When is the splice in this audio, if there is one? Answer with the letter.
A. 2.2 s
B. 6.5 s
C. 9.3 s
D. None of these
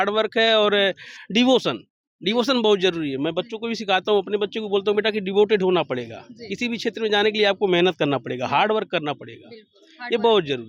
D